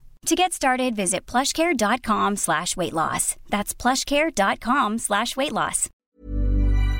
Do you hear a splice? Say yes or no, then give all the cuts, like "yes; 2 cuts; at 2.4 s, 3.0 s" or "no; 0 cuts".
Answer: yes; 1 cut; at 6.0 s